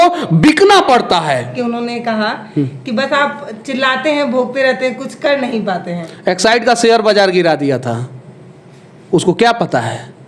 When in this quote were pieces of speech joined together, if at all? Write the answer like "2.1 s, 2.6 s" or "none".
1.5 s